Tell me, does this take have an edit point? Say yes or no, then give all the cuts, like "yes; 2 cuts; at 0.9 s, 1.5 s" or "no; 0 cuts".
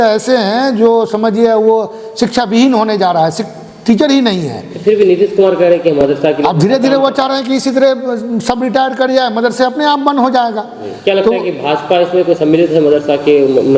no; 0 cuts